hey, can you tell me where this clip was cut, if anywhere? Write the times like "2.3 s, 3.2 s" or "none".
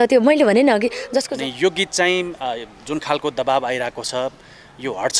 1.3 s